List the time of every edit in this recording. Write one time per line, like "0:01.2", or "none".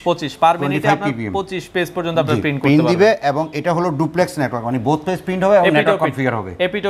none